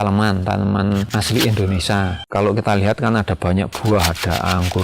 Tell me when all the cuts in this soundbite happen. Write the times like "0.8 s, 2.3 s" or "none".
1.1 s